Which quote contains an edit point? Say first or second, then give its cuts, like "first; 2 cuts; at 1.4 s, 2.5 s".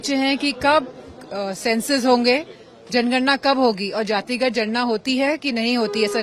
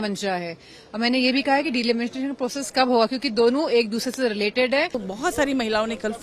second; 1 cut; at 5.0 s